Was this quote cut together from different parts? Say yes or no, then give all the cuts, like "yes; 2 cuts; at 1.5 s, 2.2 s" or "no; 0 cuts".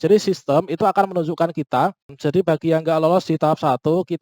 yes; 1 cut; at 2.1 s